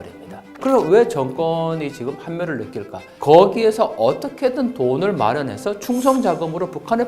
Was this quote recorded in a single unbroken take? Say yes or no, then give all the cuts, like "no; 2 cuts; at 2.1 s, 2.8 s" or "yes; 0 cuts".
no; 1 cut; at 3.0 s